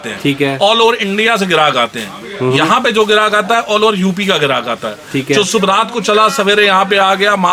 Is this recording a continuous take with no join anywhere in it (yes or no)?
yes